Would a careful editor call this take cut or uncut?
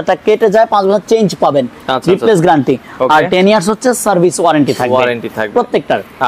uncut